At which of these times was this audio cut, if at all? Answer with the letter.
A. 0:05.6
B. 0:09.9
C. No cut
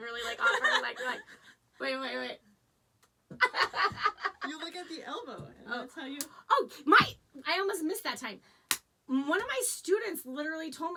C